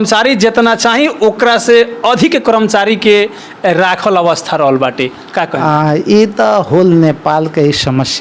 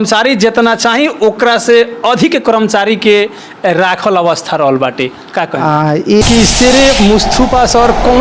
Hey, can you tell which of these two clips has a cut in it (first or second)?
second